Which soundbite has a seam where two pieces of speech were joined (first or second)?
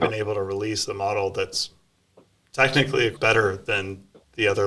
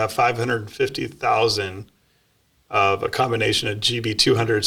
first